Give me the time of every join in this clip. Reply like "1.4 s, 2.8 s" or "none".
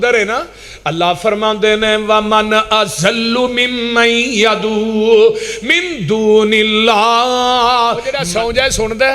8.2 s